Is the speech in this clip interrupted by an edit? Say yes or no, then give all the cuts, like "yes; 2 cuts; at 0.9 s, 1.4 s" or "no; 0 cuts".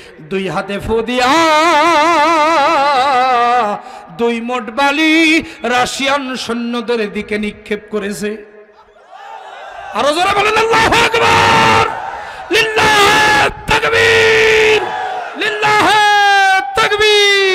no; 0 cuts